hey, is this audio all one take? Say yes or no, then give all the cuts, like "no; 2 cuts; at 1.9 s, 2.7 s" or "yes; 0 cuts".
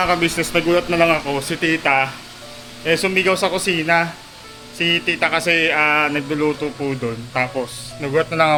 yes; 0 cuts